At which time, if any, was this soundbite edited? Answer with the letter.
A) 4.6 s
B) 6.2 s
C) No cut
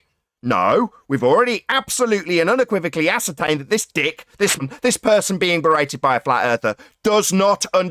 A